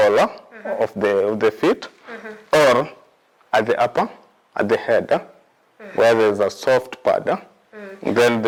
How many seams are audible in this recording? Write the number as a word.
zero